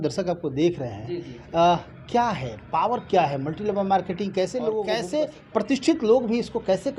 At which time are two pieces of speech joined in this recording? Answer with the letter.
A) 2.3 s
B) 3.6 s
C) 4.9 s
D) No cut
C